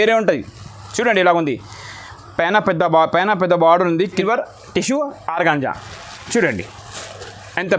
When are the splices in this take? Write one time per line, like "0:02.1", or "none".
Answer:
0:04.2